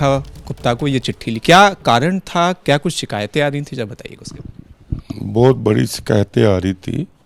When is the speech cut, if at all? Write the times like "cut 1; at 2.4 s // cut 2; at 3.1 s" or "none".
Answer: none